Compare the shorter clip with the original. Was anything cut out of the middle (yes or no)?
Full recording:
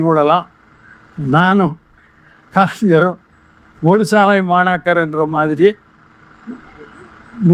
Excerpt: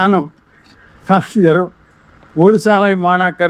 no